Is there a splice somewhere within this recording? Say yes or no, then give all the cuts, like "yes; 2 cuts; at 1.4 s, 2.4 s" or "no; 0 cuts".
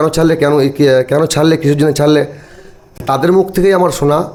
no; 0 cuts